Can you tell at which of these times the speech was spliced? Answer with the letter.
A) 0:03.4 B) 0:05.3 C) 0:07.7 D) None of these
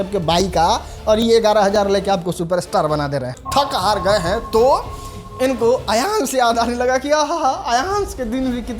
A